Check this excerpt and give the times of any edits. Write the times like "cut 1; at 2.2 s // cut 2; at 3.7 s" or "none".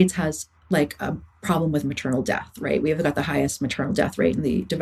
none